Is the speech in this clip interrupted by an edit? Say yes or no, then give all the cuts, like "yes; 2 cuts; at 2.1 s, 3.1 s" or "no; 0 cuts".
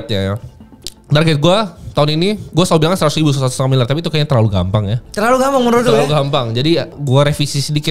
yes; 1 cut; at 6.9 s